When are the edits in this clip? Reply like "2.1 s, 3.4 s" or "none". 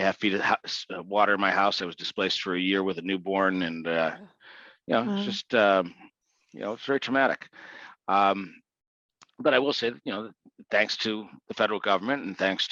none